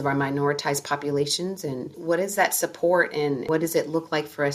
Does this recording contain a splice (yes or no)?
yes